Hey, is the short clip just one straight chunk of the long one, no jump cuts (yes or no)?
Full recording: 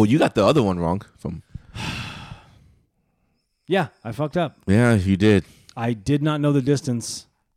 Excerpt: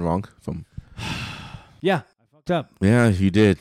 no